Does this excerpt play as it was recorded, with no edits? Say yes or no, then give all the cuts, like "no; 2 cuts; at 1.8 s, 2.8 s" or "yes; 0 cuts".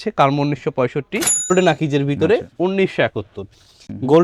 no; 1 cut; at 1.3 s